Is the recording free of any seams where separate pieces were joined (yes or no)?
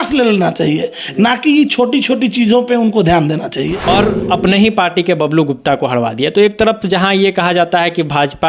no